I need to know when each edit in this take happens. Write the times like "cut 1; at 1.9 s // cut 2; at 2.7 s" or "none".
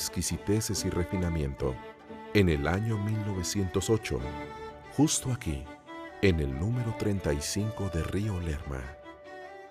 cut 1; at 2.5 s